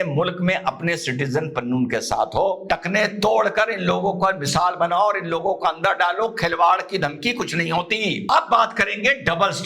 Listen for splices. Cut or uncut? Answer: cut